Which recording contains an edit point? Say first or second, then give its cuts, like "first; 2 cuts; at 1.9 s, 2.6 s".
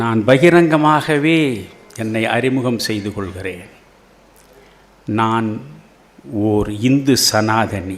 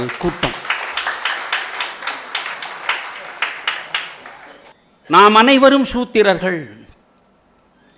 second; 1 cut; at 4.7 s